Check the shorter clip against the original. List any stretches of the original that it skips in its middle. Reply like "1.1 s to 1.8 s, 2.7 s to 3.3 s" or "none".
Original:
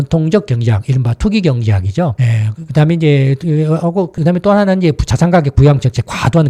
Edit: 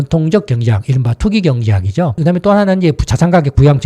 2.1 s to 4.1 s